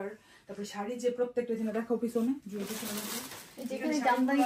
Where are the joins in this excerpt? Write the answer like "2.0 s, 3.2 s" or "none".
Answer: none